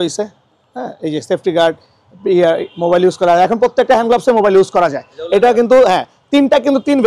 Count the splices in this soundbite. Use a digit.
1